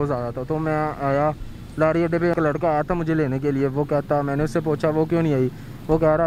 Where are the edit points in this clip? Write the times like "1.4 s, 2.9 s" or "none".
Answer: 2.3 s